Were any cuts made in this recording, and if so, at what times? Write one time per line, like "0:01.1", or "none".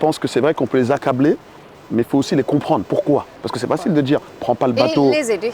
none